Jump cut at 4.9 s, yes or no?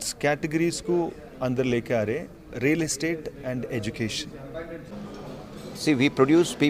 yes